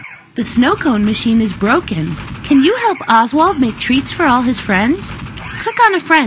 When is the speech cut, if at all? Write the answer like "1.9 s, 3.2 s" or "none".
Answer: none